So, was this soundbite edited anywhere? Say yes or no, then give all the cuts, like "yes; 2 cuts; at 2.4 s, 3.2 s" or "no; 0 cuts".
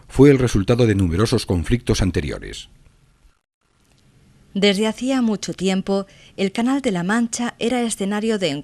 yes; 1 cut; at 4.1 s